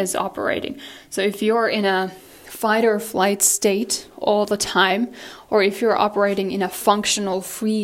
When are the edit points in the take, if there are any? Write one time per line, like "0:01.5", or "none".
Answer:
none